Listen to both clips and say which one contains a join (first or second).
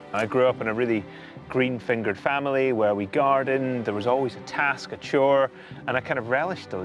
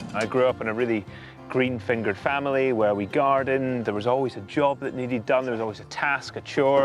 first